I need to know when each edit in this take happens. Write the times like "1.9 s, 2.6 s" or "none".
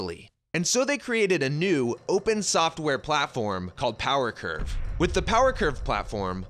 3.4 s